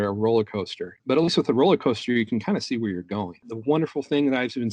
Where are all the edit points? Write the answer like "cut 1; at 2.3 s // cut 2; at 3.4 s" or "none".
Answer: cut 1; at 1.0 s // cut 2; at 3.5 s